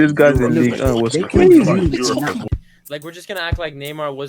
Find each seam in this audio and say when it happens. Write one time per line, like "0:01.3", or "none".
0:02.3